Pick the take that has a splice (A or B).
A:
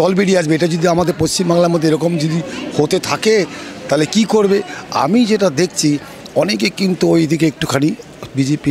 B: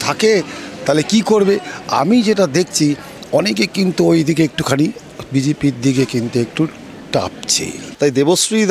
B